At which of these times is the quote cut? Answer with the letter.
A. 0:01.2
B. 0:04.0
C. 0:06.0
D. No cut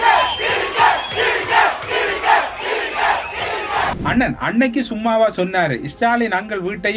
B